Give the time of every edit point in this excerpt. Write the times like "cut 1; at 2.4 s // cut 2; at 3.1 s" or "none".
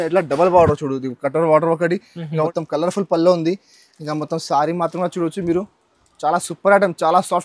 cut 1; at 2.5 s